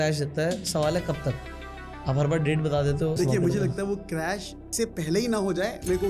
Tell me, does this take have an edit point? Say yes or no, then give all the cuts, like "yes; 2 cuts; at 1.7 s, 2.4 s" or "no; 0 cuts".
yes; 2 cuts; at 3.2 s, 4.7 s